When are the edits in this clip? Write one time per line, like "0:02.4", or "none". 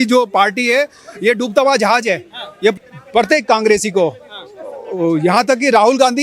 0:02.8